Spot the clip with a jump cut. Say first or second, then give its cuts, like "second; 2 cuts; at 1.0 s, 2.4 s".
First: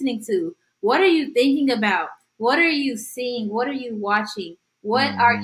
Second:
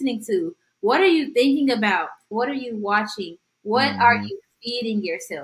second; 1 cut; at 2.3 s